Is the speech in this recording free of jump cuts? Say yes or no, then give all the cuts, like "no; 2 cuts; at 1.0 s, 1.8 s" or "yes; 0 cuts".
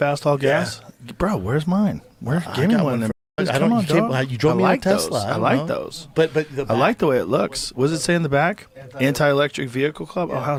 yes; 0 cuts